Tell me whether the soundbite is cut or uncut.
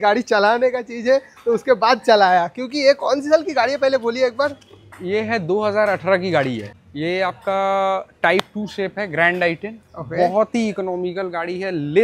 uncut